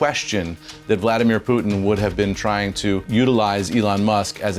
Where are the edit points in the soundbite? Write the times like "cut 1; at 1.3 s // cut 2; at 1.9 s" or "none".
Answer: cut 1; at 3.0 s